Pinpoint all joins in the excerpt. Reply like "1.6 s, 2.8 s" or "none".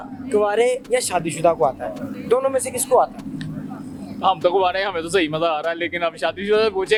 none